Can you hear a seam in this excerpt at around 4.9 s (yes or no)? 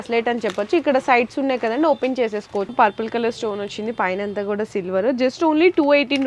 no